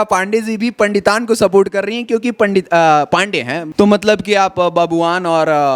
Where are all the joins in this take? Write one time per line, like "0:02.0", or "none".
0:03.6